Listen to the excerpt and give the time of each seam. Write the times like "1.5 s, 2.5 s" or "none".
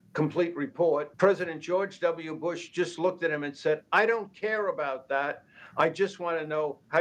1.1 s